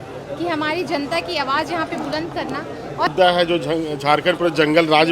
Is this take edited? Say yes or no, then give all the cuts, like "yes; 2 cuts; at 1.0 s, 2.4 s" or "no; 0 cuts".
yes; 1 cut; at 3.1 s